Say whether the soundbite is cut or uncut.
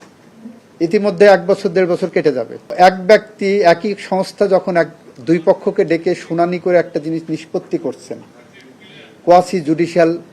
cut